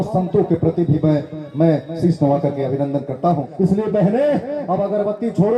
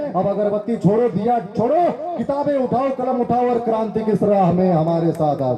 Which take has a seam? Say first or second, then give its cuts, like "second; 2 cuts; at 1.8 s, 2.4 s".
first; 1 cut; at 3.5 s